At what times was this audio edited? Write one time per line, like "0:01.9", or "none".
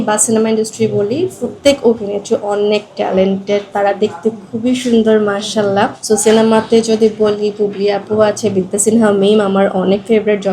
0:01.5
0:06.0